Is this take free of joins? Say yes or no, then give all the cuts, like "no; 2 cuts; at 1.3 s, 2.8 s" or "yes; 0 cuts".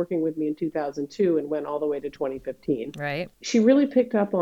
no; 1 cut; at 3.3 s